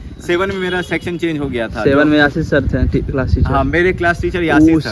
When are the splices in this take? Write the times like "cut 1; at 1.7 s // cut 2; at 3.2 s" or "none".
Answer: none